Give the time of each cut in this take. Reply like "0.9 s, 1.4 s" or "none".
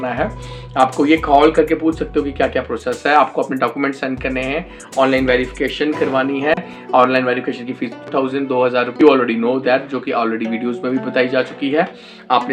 none